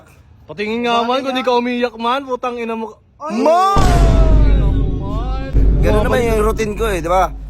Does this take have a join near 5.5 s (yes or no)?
yes